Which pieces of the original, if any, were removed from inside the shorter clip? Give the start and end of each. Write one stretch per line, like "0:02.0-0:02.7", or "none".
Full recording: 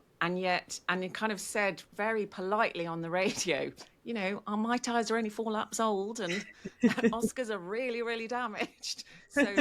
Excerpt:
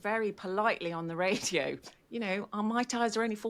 none